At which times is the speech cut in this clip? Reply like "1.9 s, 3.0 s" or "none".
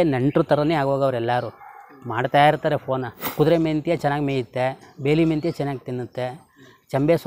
3.3 s